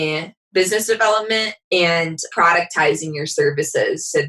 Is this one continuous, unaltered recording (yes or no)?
no